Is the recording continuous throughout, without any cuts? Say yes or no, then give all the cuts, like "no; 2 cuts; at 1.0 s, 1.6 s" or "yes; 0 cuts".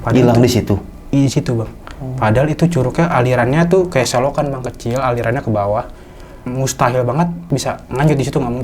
no; 1 cut; at 7.7 s